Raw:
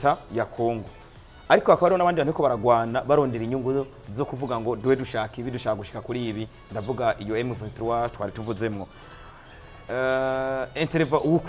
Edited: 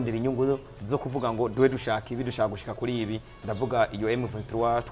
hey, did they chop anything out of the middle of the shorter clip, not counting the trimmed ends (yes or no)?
no